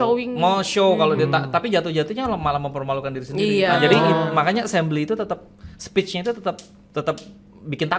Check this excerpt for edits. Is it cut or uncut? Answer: uncut